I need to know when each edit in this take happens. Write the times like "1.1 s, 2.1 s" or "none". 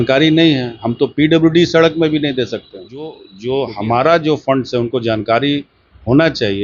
none